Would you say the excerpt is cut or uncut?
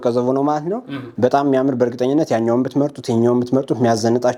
uncut